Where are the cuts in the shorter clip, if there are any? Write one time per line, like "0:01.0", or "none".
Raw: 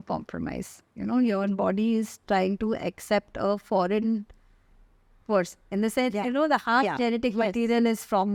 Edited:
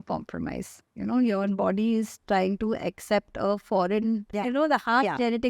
0:04.4